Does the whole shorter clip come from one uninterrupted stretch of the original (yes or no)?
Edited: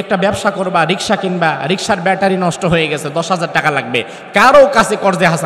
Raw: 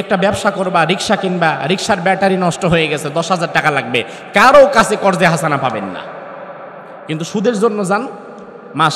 yes